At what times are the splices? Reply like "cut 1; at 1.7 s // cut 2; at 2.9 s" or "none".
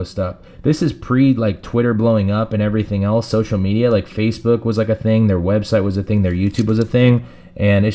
none